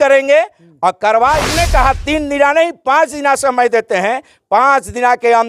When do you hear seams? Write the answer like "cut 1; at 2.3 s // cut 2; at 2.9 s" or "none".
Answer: cut 1; at 1.5 s